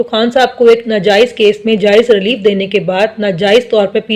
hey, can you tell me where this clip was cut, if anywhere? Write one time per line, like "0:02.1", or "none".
none